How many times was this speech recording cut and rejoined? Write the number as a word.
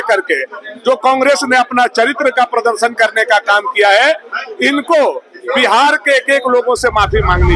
zero